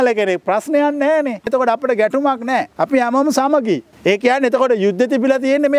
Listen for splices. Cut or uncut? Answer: cut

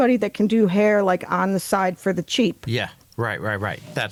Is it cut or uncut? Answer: uncut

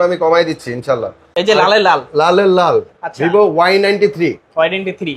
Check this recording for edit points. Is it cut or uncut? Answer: cut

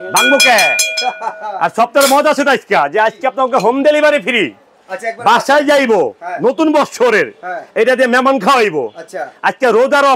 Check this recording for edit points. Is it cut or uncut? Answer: uncut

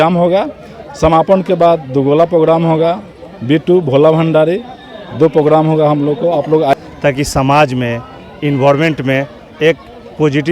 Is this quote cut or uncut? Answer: cut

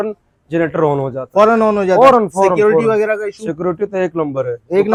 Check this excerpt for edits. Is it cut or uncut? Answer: uncut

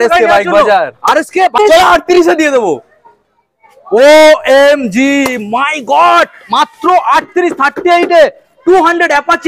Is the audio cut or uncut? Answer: cut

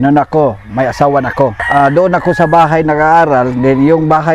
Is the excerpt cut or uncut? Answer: cut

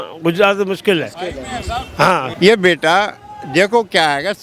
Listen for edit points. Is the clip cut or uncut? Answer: cut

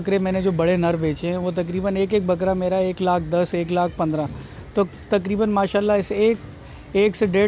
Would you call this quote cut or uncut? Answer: uncut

